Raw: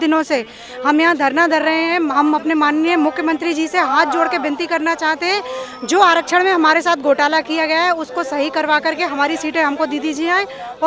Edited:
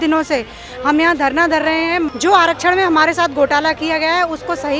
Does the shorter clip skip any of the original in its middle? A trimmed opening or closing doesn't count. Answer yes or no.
yes